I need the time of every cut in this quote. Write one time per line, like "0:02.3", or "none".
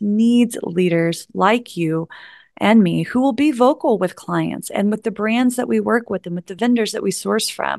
0:06.5